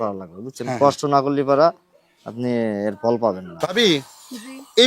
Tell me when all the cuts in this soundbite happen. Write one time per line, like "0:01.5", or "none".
0:03.7